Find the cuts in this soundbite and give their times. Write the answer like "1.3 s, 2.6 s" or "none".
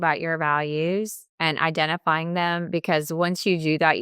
1.2 s